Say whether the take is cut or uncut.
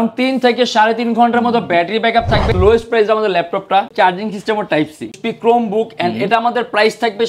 cut